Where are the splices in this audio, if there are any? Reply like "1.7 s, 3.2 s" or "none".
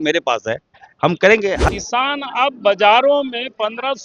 1.6 s